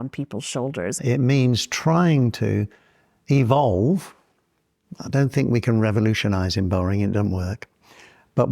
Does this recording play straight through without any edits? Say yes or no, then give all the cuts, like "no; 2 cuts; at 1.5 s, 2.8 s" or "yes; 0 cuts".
no; 1 cut; at 0.9 s